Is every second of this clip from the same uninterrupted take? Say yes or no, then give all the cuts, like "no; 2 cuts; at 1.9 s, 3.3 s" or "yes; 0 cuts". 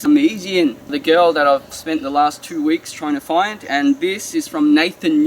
no; 2 cuts; at 1.0 s, 1.7 s